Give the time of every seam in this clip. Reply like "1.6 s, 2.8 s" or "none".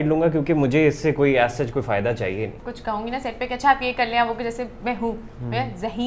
2.6 s